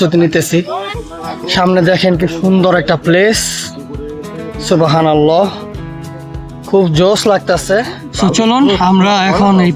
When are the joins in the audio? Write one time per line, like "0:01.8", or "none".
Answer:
0:08.1